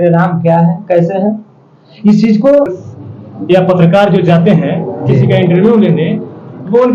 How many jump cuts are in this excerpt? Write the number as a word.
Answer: one